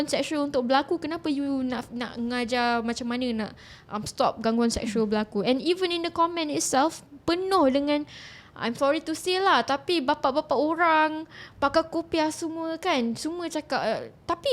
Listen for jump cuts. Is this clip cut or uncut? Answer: uncut